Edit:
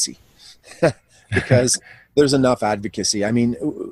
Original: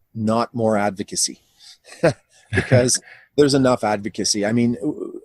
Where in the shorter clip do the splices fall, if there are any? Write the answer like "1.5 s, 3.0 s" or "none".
none